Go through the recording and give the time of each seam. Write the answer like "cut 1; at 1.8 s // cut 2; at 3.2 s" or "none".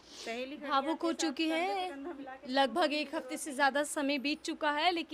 none